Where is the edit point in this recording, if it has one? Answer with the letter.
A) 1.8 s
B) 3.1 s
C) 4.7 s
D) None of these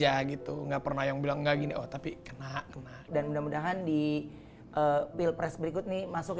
B